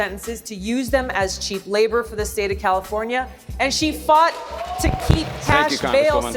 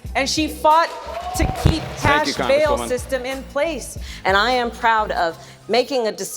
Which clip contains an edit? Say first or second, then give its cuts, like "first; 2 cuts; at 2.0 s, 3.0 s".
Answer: second; 1 cut; at 3.9 s